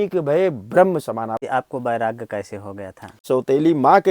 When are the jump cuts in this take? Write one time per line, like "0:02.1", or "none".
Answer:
0:01.3

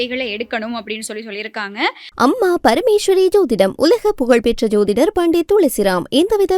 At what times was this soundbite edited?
0:02.0

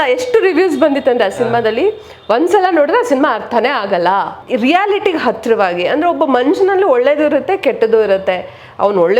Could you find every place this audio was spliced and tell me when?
0:04.4

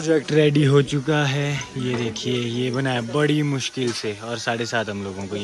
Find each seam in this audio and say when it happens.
none

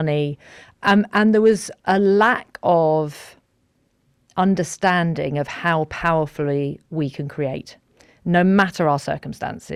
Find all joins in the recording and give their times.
none

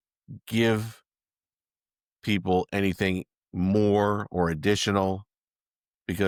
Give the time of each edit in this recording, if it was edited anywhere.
none

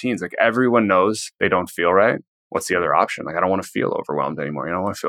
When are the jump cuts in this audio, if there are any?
0:01.3
0:02.3

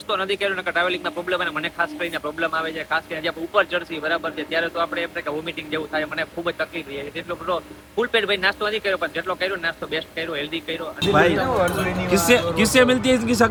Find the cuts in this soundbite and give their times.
none

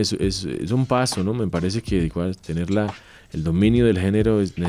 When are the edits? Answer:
none

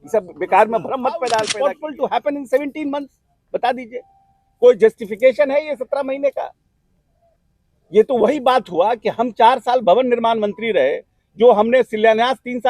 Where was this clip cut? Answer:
0:01.5

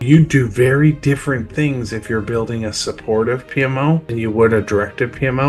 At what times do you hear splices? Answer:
0:04.2

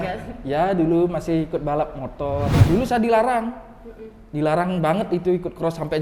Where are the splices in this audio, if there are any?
0:02.5

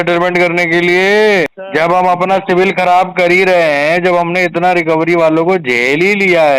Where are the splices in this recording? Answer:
0:01.6

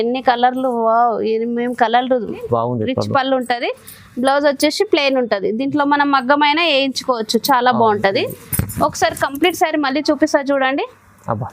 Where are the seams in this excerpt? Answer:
0:02.4

